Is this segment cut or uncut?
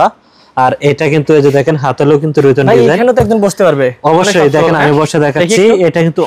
uncut